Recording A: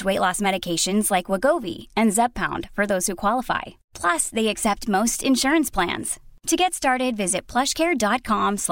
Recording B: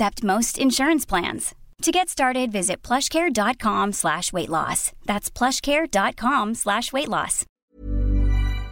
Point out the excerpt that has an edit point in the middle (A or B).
B